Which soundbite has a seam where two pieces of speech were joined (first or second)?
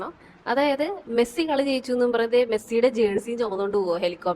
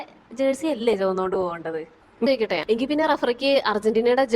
second